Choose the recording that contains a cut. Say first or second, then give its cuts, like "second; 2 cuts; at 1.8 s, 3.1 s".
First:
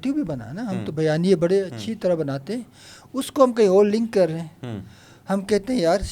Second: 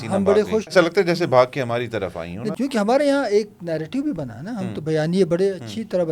second; 2 cuts; at 0.7 s, 2.4 s